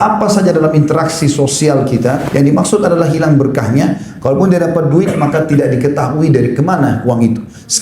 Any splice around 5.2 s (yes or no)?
no